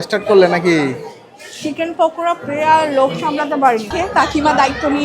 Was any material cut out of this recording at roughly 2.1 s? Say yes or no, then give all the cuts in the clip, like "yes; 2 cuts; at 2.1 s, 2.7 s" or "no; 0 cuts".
no; 1 cut; at 3.9 s